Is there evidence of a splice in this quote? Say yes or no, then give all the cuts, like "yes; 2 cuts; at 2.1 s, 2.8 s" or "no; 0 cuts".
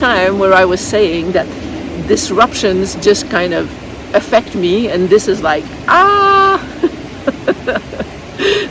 no; 0 cuts